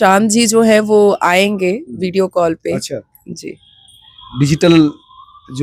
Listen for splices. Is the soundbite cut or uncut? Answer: uncut